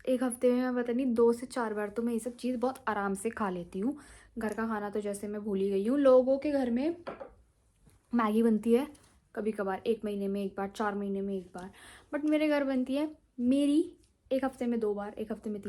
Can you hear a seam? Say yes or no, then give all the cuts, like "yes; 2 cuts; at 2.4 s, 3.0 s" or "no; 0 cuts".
no; 0 cuts